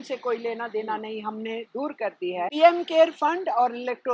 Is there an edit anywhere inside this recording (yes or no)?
yes